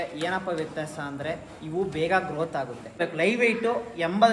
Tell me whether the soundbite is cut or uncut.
cut